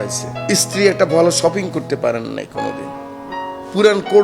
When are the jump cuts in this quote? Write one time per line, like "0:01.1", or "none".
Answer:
none